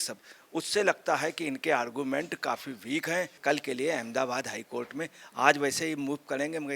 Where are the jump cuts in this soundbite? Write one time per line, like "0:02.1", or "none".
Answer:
0:03.4